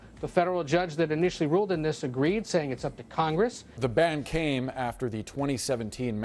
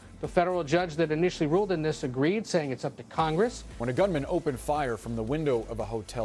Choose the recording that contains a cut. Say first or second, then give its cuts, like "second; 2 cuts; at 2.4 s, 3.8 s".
first; 1 cut; at 3.6 s